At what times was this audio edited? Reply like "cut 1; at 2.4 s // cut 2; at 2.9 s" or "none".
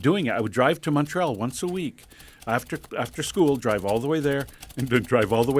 none